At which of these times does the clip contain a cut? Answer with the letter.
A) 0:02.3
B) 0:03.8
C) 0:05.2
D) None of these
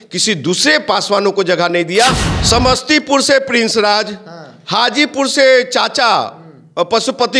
A